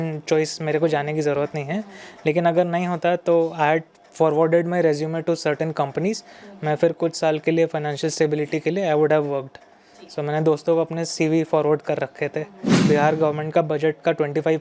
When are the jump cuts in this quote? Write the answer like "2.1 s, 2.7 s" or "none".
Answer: 12.8 s